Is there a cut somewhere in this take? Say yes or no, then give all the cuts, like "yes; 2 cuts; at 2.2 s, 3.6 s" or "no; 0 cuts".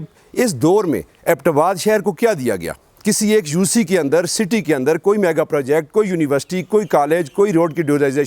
no; 0 cuts